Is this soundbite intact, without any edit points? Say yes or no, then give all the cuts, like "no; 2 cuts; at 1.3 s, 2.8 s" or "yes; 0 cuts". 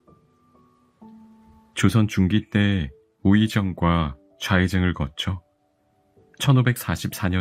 yes; 0 cuts